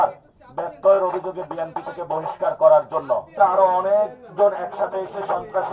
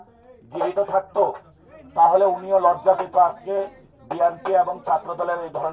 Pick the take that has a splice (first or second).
first